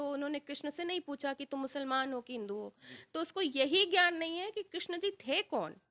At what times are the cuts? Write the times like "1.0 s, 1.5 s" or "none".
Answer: none